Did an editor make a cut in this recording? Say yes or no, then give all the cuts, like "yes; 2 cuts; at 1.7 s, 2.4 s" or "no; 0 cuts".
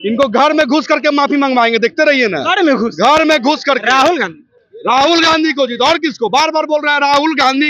no; 0 cuts